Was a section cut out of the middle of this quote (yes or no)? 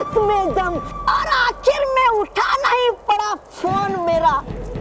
no